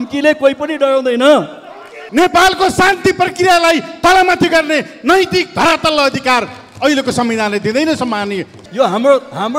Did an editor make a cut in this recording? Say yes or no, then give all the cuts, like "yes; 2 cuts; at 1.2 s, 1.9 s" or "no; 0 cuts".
yes; 2 cuts; at 2.0 s, 8.5 s